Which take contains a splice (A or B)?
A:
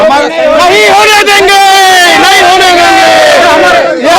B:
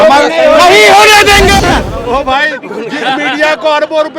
B